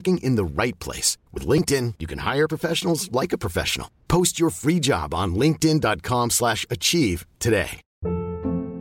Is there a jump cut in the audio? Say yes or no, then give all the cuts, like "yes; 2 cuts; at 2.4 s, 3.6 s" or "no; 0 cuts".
yes; 1 cut; at 7.8 s